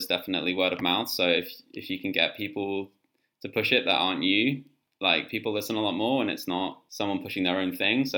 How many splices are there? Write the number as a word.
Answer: one